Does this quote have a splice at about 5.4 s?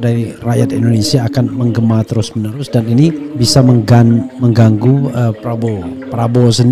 yes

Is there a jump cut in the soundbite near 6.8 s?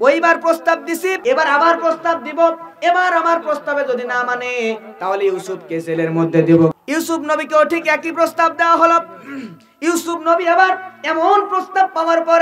yes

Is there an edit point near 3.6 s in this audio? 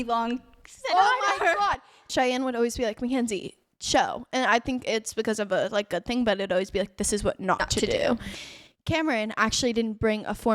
no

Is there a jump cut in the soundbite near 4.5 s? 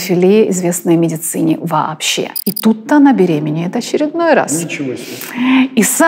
no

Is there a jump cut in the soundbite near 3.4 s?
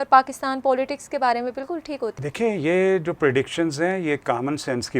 no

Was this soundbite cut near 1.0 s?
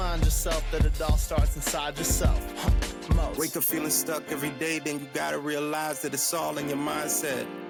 no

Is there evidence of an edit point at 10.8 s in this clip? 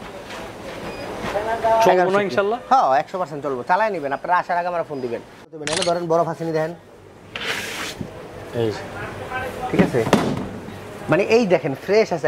no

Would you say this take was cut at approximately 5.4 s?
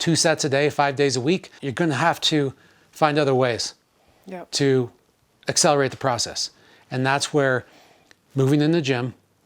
no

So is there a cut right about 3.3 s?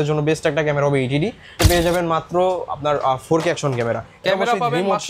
no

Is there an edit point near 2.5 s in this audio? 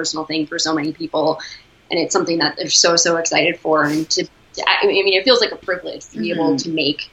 no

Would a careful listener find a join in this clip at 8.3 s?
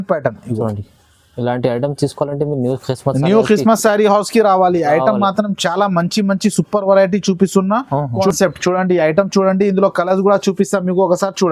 yes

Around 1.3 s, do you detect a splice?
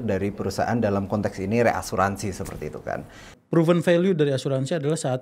no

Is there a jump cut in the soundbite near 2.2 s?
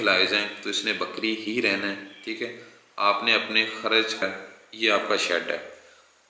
no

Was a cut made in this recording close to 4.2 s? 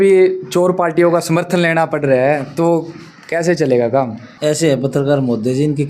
yes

